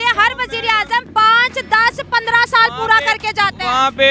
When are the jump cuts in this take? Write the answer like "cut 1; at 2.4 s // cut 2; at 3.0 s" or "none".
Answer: cut 1; at 1.1 s